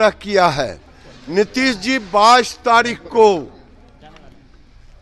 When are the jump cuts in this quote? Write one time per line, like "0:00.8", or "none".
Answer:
none